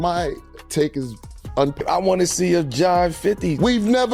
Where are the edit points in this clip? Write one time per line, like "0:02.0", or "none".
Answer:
0:01.8